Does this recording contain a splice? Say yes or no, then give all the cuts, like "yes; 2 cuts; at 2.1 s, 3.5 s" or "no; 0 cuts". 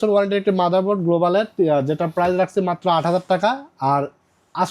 no; 0 cuts